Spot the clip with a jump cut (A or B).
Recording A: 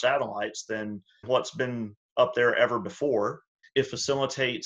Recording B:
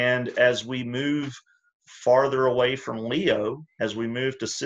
A